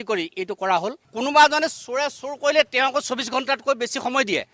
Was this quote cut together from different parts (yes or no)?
yes